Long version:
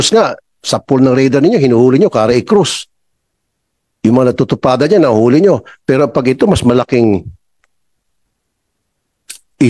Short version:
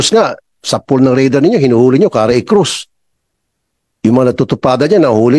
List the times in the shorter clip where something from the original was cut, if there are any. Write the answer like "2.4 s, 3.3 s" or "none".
none